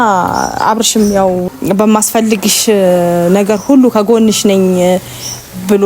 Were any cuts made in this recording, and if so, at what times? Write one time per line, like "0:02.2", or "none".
0:01.5

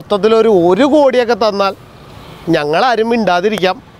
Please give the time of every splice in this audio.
none

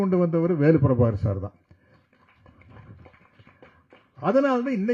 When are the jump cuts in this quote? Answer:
none

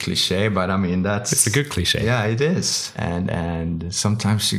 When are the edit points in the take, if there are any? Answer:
0:02.8

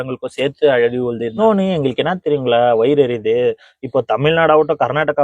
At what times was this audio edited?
0:01.4

